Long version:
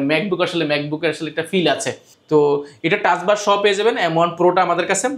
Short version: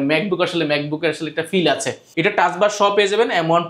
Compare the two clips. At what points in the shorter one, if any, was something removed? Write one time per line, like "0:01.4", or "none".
0:02.0

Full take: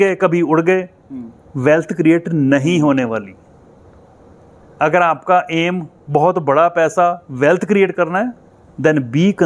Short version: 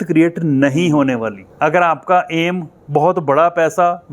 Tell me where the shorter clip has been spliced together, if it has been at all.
0:01.4

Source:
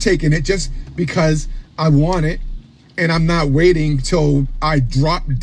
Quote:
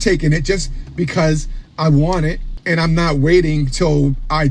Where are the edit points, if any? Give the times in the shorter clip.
0:02.5

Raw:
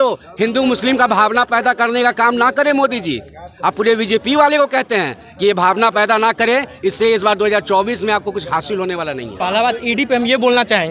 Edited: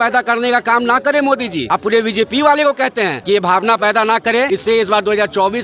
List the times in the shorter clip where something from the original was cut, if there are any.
0:01.6
0:03.2
0:04.5

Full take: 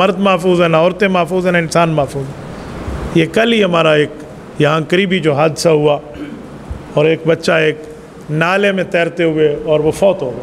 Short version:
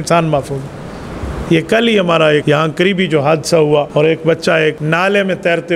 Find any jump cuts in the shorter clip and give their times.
0:02.4
0:03.9
0:04.8

